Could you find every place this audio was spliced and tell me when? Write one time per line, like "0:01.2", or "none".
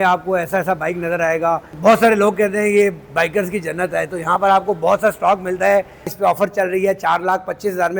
0:01.7
0:06.1